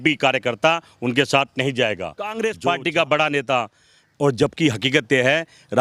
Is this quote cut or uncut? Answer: cut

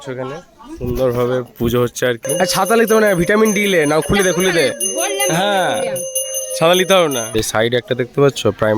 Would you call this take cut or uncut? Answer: cut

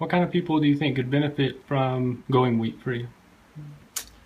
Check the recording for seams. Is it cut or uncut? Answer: cut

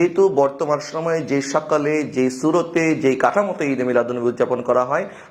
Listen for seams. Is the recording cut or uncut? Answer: uncut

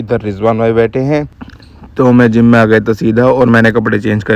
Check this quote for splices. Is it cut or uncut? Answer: cut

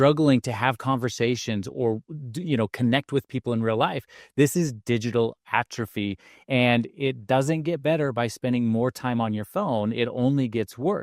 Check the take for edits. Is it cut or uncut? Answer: uncut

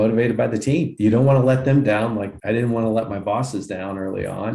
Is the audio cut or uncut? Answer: cut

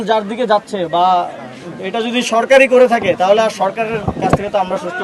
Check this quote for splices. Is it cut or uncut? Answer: uncut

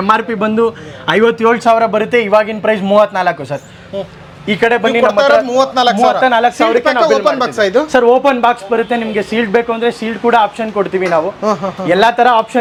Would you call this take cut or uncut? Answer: uncut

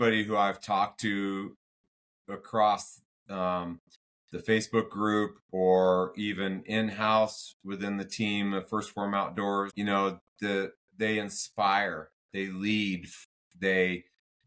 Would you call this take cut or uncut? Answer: cut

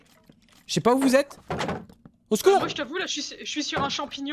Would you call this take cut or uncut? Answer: uncut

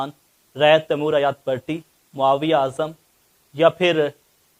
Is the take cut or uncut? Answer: uncut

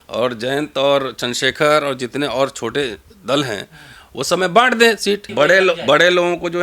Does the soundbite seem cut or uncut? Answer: cut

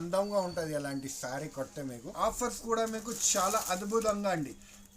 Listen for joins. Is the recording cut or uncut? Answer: cut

